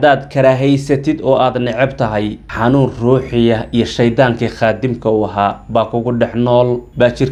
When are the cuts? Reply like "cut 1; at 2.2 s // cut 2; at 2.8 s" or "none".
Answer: none